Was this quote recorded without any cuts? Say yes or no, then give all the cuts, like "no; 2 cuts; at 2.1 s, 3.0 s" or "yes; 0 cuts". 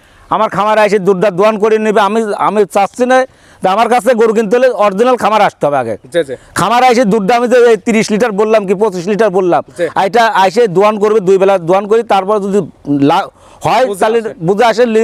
yes; 0 cuts